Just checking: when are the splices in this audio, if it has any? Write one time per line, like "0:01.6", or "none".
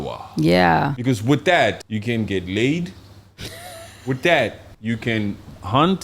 0:01.0
0:01.8
0:04.7